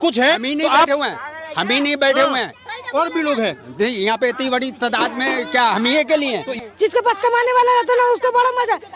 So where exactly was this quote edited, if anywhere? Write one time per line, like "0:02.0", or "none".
0:06.6